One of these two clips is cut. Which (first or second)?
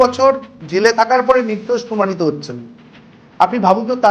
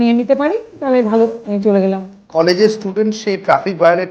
second